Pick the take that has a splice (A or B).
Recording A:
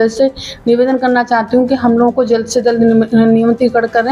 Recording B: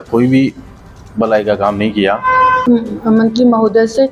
B